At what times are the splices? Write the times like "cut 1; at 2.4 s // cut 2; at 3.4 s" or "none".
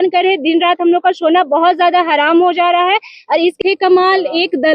cut 1; at 3.6 s